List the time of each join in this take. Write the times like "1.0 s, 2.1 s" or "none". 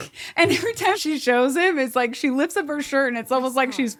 none